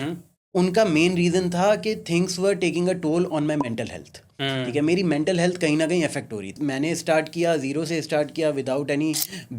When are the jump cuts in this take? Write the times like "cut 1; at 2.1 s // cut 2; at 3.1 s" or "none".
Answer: cut 1; at 6.5 s